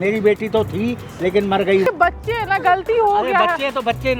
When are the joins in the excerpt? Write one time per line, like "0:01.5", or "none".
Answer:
0:01.9